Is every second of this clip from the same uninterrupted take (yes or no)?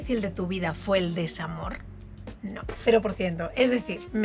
yes